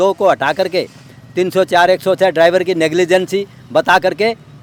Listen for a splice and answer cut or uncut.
uncut